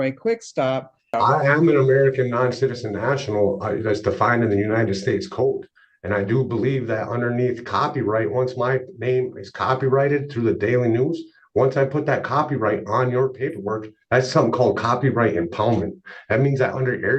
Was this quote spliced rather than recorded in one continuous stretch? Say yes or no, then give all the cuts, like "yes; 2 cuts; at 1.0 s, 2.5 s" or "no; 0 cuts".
yes; 1 cut; at 1.1 s